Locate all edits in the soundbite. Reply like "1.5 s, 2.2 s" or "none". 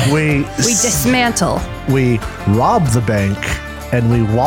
1.7 s